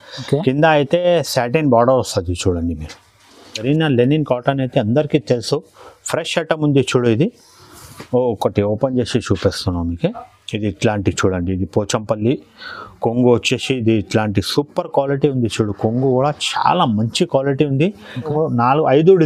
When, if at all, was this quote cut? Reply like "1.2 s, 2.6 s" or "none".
3.6 s, 18.3 s

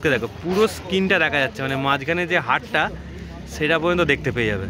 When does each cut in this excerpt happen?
none

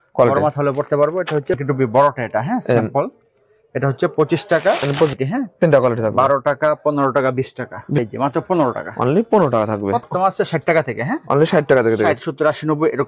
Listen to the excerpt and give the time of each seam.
1.6 s, 5.2 s, 8.0 s, 10.1 s

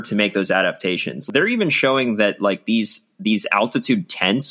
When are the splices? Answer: 1.2 s

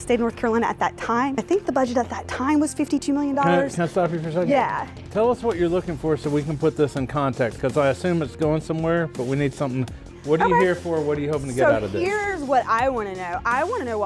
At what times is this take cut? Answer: 1.4 s

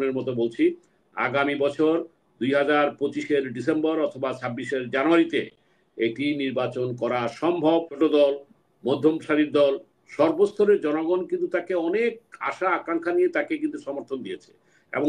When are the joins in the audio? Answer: 8.0 s

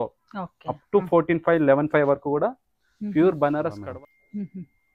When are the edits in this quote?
3.8 s

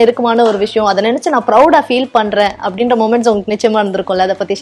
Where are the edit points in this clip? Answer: none

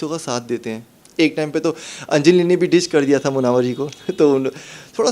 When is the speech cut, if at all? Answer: 0.9 s

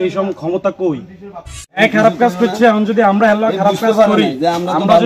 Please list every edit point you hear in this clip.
1.8 s

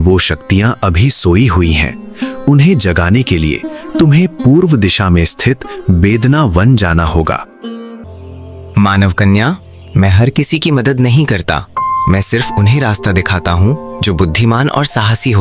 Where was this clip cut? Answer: 7.9 s

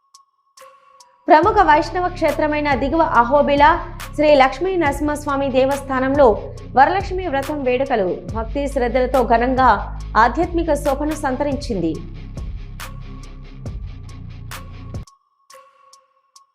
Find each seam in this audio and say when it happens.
0.9 s

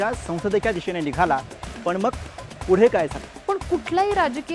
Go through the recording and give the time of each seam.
3.3 s

